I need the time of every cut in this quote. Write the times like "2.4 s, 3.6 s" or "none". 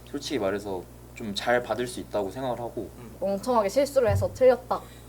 3.1 s